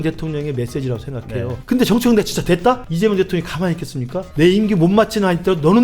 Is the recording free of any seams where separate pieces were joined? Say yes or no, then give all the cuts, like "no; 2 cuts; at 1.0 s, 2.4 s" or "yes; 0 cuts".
no; 3 cuts; at 1.6 s, 2.9 s, 4.2 s